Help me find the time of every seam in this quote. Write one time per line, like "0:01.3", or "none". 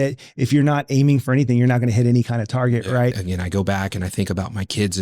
0:03.2